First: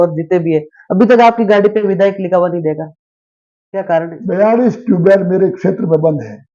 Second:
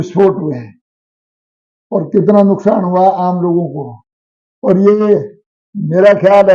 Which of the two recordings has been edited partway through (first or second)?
first